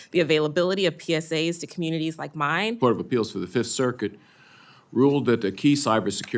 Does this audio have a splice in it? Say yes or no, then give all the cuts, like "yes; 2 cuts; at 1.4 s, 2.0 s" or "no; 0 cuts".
yes; 1 cut; at 2.8 s